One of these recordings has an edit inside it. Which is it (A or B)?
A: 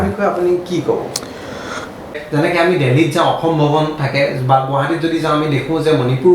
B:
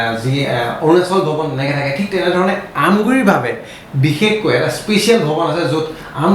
A